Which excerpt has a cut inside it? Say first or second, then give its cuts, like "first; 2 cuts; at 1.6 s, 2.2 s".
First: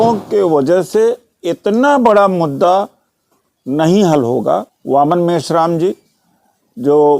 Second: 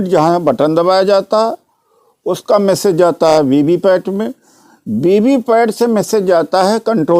first; 1 cut; at 4.7 s